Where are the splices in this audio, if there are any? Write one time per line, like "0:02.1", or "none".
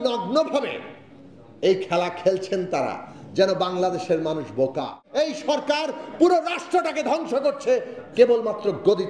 0:05.0